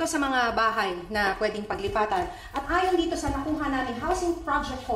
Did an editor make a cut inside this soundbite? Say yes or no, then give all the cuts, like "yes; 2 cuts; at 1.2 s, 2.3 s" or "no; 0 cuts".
yes; 1 cut; at 1.4 s